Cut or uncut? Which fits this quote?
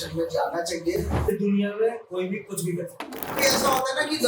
cut